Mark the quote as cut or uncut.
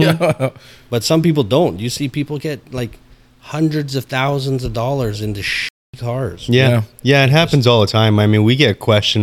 uncut